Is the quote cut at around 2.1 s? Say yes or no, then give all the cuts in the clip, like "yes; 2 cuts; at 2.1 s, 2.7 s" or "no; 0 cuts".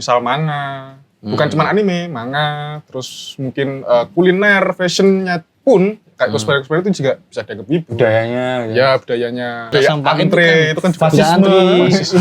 no; 1 cut; at 9.6 s